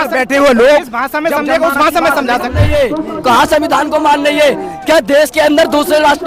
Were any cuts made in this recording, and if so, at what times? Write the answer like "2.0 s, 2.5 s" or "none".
2.6 s